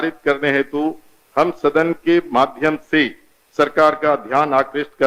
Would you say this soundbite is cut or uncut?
uncut